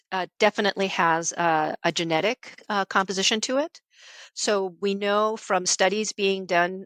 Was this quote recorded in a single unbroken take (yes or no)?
yes